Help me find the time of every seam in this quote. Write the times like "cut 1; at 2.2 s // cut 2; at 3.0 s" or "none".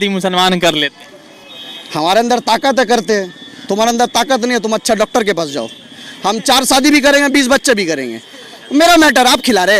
none